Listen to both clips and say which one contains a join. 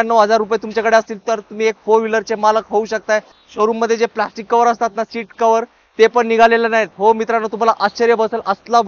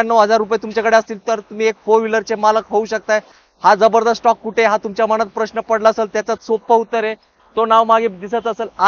first; 1 cut; at 3.4 s

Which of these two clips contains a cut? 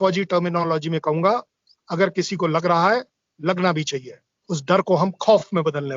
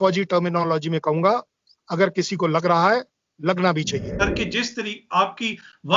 second; 1 cut; at 4.2 s

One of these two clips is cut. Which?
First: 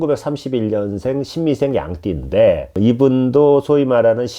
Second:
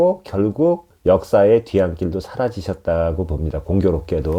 first; 1 cut; at 2.8 s

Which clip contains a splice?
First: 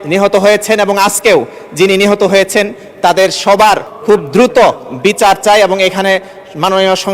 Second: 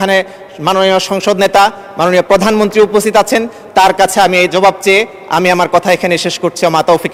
first; 1 cut; at 3.9 s

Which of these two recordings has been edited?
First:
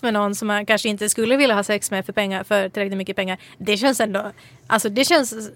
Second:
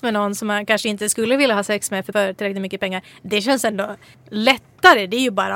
second; 2 cuts; at 2.1 s, 4.1 s

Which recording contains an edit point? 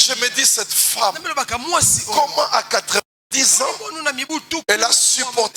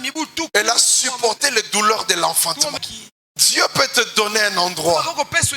second; 1 cut; at 2.8 s

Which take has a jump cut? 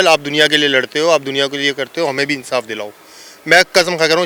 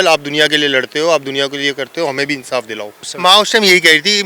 second; 1 cut; at 3.0 s

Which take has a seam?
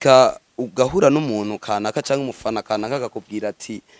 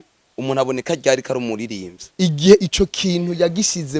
second; 1 cut; at 2.1 s

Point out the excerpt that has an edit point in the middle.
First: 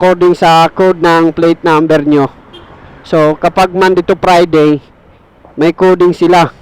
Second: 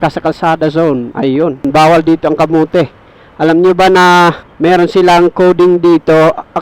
second; 2 cuts; at 1.7 s, 4.5 s

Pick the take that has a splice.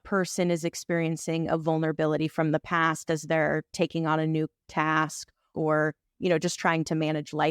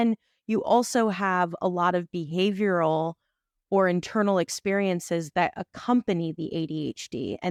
first; 1 cut; at 5.5 s

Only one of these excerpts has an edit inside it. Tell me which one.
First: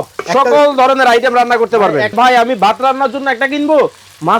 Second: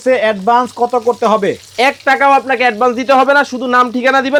first; 1 cut; at 2.1 s

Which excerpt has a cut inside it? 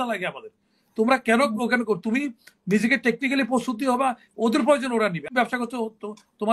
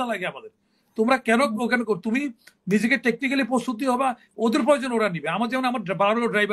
first; 1 cut; at 5.2 s

